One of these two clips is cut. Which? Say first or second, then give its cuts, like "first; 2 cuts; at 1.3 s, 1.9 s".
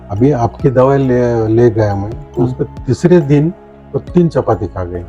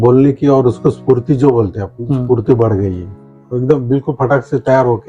second; 1 cut; at 3.4 s